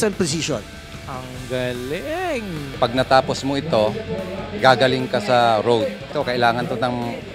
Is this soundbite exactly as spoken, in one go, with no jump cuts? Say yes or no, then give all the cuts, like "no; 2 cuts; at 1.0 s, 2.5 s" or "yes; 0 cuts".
no; 2 cuts; at 2.6 s, 6.1 s